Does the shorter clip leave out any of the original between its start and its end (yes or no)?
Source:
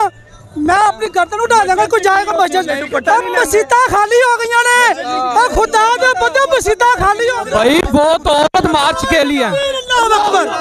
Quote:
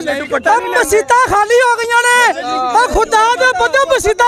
no